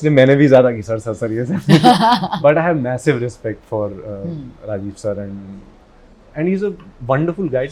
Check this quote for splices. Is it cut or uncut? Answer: uncut